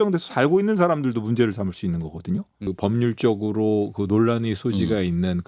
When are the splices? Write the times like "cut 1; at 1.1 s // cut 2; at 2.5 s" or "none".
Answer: cut 1; at 2.7 s